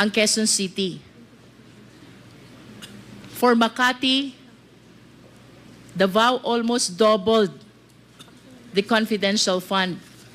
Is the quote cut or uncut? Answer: uncut